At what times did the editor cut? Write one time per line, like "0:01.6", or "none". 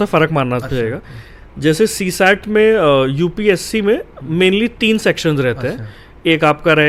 none